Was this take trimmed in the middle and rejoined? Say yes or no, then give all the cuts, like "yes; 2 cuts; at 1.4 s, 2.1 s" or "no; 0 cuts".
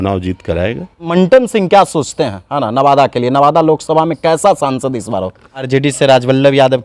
yes; 2 cuts; at 1.0 s, 5.7 s